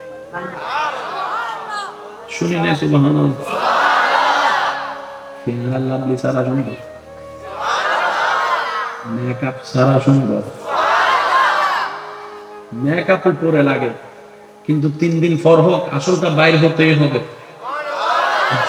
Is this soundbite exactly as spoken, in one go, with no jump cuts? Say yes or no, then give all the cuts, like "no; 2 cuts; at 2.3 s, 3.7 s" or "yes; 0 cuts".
yes; 0 cuts